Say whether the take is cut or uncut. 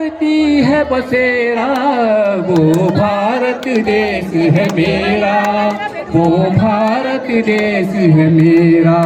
uncut